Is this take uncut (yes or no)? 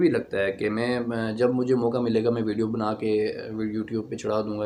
yes